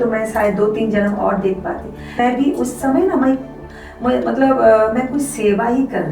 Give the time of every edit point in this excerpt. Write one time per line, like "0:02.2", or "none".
0:02.2